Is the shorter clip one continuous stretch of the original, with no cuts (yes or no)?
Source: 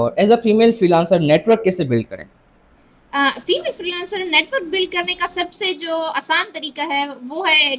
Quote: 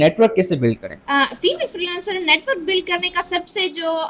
no